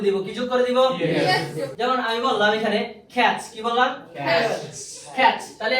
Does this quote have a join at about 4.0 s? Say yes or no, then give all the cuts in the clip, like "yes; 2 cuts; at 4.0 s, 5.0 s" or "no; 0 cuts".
no; 1 cut; at 1.7 s